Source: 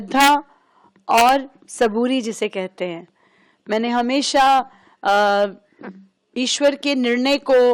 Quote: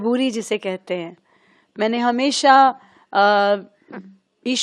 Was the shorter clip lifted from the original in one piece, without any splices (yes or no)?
yes